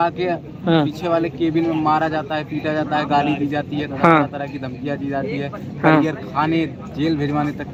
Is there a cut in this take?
no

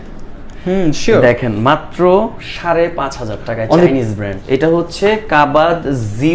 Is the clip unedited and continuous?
no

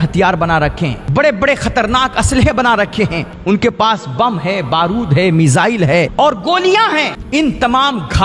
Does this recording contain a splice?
yes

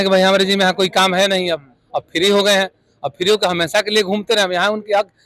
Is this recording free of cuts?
yes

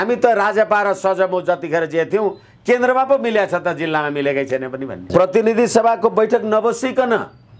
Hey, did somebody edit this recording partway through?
yes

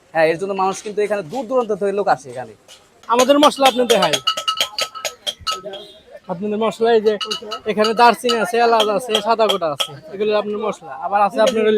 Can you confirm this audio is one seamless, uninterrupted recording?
no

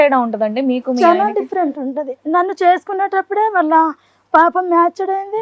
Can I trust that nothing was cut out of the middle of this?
yes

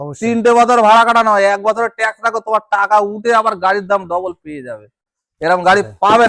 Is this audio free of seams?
yes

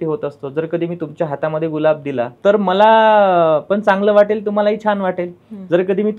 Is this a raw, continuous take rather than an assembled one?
no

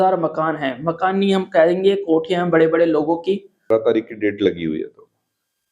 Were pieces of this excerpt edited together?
yes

